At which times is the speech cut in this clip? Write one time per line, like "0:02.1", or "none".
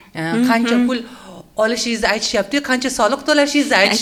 none